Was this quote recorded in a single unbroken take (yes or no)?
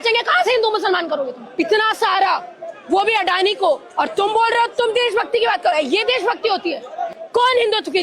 no